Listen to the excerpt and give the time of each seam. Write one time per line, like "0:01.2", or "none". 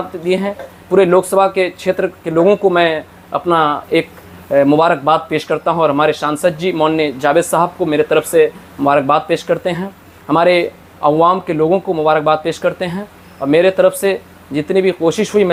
none